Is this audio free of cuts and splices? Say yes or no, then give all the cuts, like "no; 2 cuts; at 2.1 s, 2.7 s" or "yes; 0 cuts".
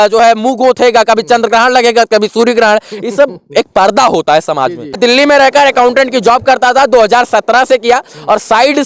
no; 1 cut; at 5.0 s